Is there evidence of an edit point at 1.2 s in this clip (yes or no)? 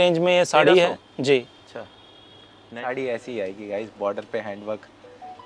no